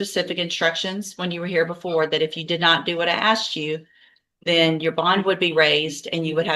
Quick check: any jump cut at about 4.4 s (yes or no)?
no